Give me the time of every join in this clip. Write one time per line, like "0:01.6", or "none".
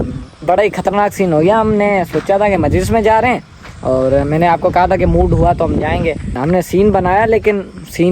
0:06.3